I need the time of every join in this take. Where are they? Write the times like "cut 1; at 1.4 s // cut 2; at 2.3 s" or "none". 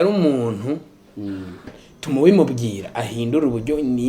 cut 1; at 1.7 s